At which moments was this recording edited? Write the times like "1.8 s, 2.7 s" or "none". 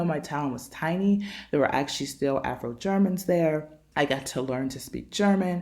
3.8 s

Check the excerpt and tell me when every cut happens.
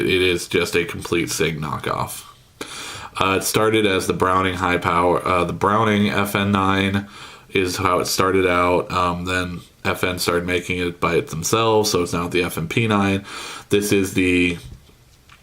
2.2 s

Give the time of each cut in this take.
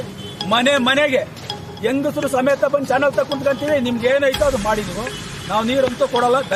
none

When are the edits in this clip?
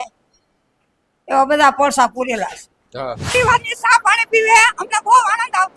3.3 s

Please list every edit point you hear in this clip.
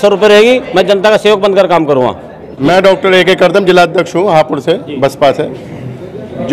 2.5 s

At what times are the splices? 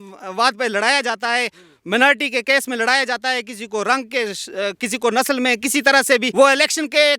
6.3 s

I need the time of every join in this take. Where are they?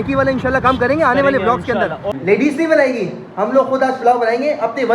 2.1 s

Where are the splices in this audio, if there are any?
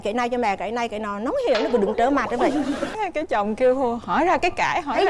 2.9 s

